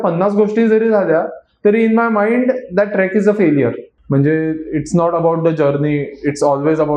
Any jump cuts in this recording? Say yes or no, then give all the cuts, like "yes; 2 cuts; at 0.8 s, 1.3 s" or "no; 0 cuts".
yes; 1 cut; at 3.9 s